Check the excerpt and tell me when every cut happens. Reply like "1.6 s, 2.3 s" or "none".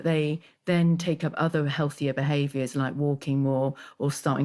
none

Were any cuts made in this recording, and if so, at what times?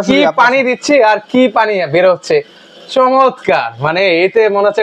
none

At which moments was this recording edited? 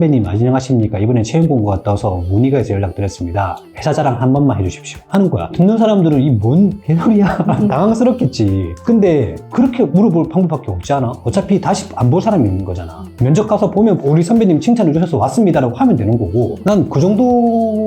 16.5 s

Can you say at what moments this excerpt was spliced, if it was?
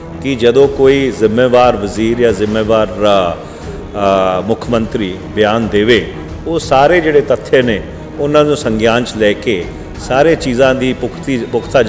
none

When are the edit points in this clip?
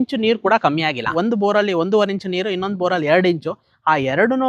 1.1 s

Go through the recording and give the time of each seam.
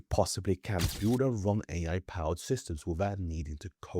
0.9 s

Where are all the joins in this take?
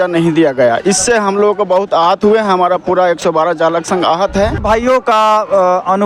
4.6 s

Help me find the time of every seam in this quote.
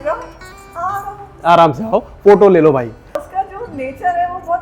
3.1 s

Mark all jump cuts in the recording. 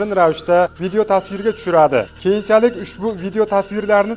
none

